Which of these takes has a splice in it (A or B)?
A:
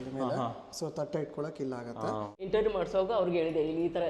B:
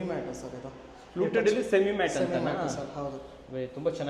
A